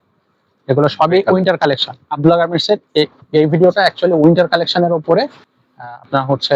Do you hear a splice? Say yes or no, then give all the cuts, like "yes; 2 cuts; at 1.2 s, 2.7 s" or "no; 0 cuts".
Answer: no; 0 cuts